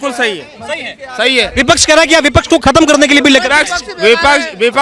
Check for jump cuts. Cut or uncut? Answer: uncut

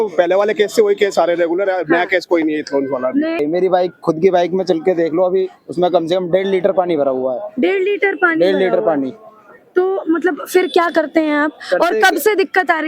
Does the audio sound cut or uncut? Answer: cut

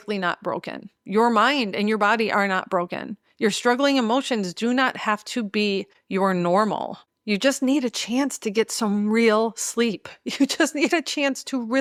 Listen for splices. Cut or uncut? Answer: uncut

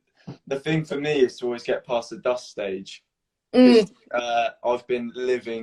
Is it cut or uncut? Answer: uncut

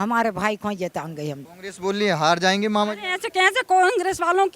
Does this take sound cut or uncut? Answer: cut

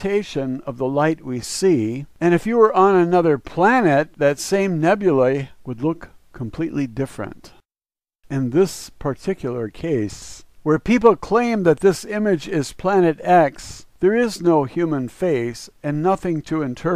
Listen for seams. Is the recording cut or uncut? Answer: uncut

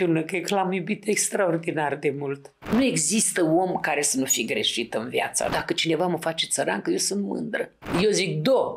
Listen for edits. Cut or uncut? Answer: cut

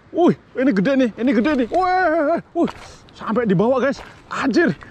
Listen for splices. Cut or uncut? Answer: uncut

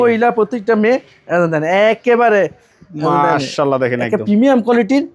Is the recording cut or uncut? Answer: uncut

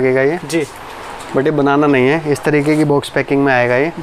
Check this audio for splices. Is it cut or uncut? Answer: uncut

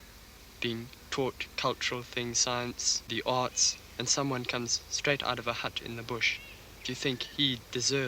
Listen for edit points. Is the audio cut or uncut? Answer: cut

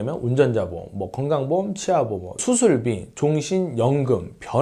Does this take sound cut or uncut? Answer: uncut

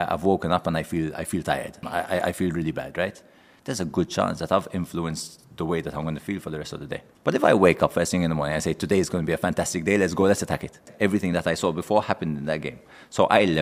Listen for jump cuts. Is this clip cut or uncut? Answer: cut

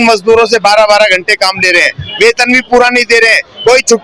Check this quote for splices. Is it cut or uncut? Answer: uncut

